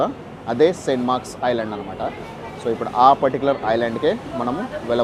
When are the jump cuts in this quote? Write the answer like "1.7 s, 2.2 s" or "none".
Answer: none